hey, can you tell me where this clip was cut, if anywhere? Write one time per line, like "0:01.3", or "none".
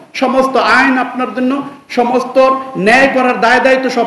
none